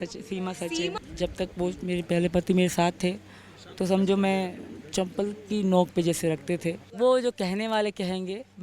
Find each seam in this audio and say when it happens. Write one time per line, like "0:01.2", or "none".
0:01.0
0:06.9